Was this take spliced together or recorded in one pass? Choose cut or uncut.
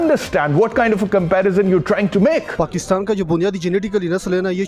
cut